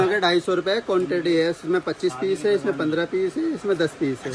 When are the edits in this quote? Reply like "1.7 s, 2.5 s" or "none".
none